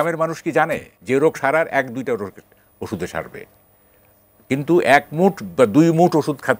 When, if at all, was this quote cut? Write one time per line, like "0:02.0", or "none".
0:00.9